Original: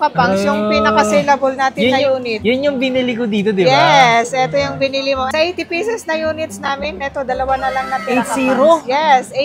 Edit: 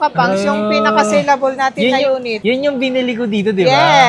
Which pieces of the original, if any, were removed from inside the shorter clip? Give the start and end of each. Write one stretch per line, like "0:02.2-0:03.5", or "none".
none

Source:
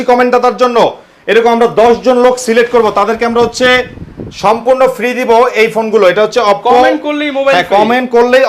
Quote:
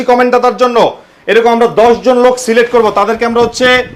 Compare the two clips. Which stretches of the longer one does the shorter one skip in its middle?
none

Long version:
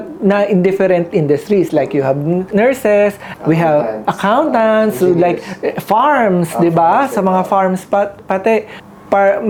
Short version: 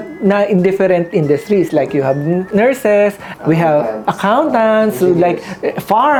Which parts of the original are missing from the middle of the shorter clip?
none

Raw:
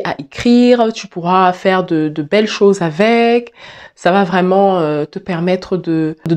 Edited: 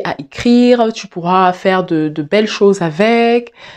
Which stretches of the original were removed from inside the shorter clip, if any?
none

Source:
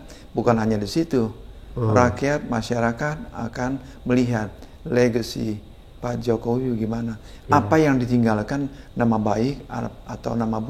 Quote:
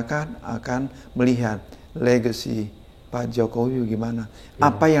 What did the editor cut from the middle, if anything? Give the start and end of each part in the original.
none

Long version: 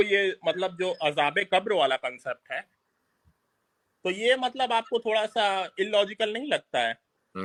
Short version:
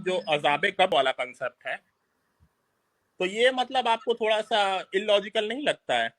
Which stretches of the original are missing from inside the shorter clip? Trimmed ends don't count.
0:01.6-0:01.8

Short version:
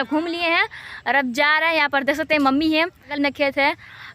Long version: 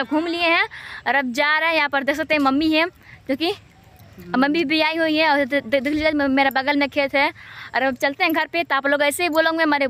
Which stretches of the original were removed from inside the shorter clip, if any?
0:03.1-0:06.7

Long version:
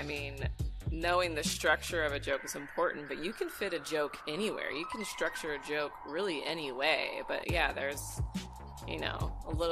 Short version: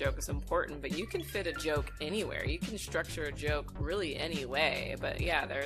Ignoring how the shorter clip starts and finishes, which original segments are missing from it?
none

